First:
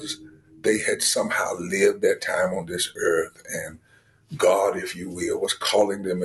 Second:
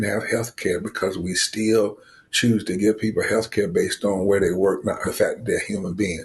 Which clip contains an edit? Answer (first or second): second